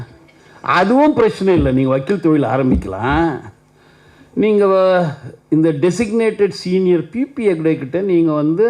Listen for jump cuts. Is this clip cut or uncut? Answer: uncut